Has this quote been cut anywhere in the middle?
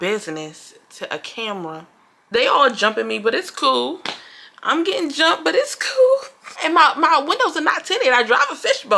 yes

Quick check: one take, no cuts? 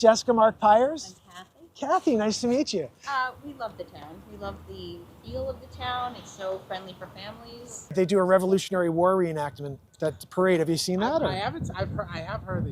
no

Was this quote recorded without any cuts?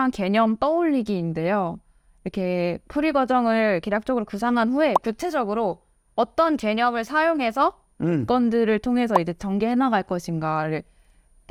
yes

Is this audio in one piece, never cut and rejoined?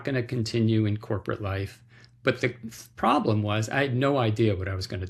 yes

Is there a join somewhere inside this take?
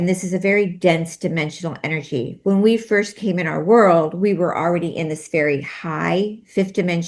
no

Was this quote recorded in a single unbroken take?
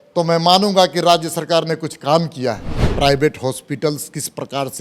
no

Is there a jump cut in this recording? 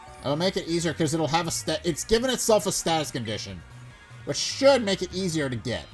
no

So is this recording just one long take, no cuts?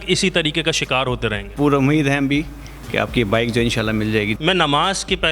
no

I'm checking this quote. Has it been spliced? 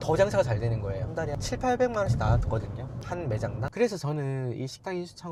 no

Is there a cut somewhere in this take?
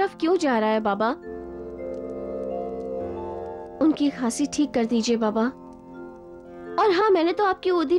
no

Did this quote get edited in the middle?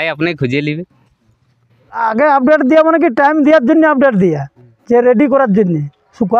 yes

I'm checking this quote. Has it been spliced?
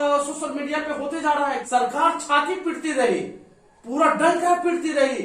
yes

